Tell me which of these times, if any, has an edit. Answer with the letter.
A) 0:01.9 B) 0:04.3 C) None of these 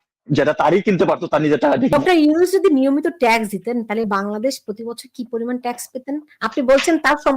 A